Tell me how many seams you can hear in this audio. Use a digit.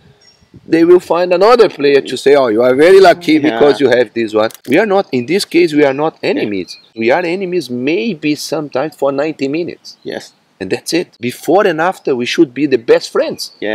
3